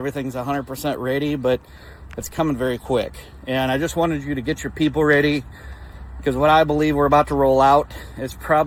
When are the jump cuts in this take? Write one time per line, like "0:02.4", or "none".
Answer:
none